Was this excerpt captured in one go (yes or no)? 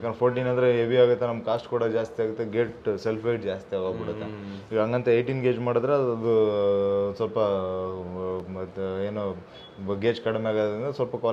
yes